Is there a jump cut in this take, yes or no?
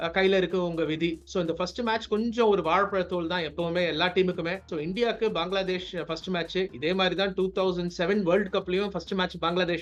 no